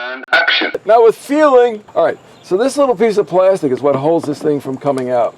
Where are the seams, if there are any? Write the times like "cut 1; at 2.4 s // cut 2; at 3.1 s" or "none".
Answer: cut 1; at 1.8 s